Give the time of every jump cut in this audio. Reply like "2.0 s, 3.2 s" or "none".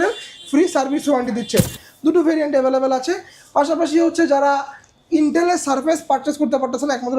1.7 s